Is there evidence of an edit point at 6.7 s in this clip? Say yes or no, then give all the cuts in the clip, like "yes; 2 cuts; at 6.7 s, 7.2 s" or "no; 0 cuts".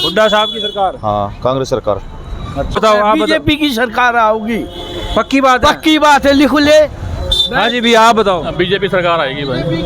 no; 1 cut; at 2.8 s